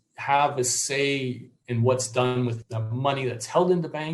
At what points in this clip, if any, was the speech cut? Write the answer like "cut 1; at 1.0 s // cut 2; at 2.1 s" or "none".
cut 1; at 2.7 s